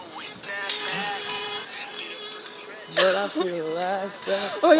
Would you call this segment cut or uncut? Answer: uncut